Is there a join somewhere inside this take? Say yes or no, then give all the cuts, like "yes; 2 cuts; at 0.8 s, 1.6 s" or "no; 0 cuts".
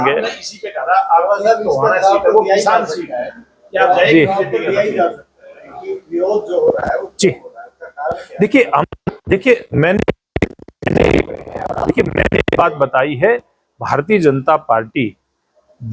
no; 0 cuts